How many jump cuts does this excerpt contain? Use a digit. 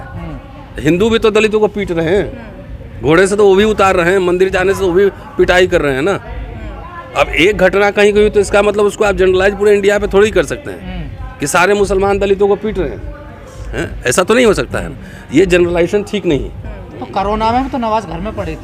0